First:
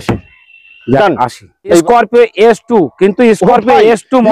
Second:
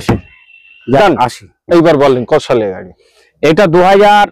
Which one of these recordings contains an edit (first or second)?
first